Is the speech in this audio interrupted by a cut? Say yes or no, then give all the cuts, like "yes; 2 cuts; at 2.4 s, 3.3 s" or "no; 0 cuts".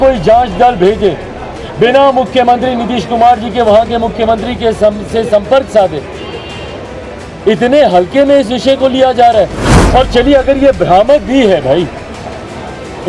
no; 0 cuts